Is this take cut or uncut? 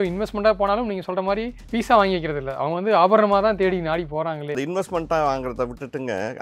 cut